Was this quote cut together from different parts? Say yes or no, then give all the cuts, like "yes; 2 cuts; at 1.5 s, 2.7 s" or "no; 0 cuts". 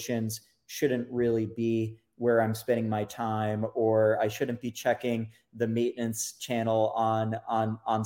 no; 0 cuts